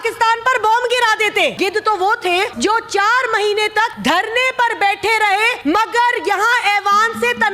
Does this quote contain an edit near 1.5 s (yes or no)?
yes